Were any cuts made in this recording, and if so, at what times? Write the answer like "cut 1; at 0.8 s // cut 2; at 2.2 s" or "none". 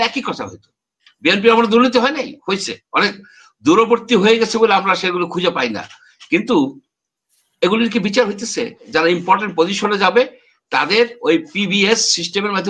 cut 1; at 8.8 s